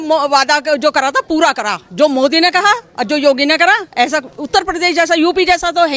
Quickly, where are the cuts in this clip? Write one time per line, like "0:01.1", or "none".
none